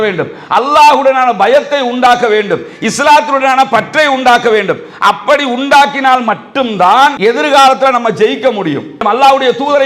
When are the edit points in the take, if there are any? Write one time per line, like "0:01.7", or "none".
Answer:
0:07.2
0:09.0